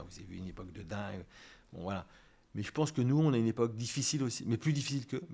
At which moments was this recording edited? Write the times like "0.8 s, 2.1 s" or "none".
none